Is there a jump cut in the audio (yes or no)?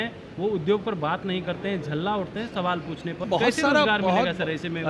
yes